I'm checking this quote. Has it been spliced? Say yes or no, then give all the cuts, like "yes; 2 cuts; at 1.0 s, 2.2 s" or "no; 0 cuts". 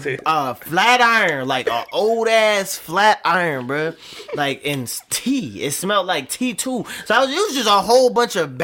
no; 0 cuts